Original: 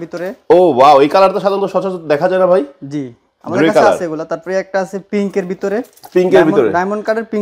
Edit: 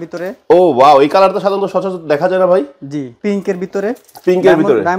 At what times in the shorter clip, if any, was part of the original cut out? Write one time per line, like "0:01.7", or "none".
0:03.1